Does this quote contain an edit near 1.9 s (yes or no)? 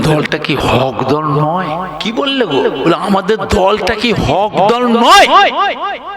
yes